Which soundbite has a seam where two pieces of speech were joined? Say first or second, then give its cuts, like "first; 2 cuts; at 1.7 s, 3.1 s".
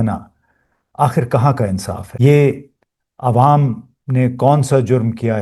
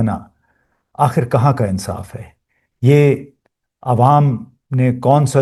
first; 1 cut; at 2.0 s